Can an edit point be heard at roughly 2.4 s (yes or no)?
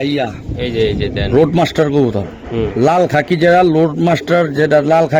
no